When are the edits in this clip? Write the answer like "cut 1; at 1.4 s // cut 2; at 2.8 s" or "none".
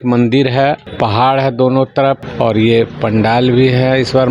cut 1; at 0.9 s // cut 2; at 2.3 s